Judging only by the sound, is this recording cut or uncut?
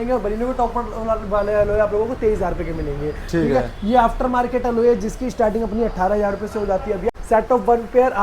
cut